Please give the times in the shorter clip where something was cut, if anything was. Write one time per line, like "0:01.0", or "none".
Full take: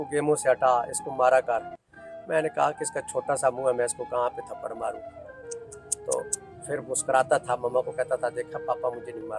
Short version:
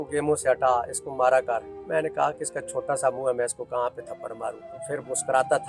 0:01.8
0:04.7